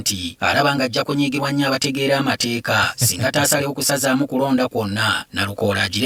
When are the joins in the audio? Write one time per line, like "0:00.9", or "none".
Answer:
none